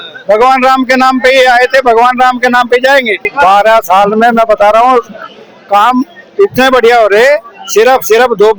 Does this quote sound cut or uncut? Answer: cut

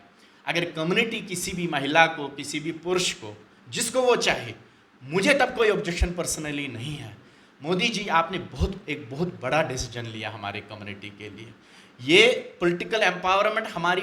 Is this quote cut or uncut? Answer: uncut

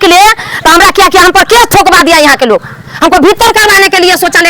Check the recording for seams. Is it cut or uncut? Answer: uncut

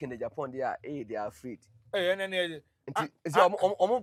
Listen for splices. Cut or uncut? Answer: uncut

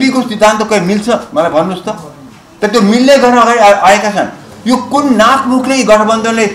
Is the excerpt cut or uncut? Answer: uncut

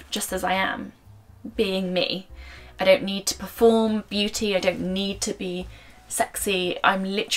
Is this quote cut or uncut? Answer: uncut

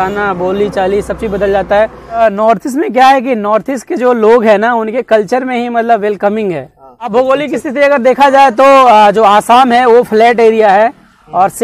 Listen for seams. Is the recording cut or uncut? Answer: cut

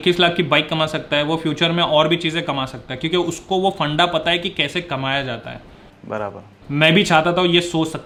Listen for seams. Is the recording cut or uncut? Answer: uncut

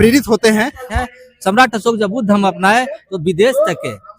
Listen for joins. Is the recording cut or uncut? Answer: cut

